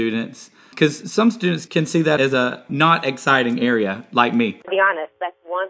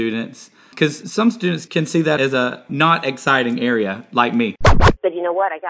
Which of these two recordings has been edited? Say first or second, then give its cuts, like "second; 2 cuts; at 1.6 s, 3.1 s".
second; 1 cut; at 4.7 s